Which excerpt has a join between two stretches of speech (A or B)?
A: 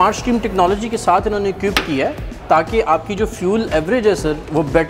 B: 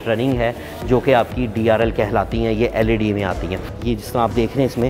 B